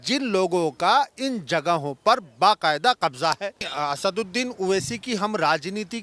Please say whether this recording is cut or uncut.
cut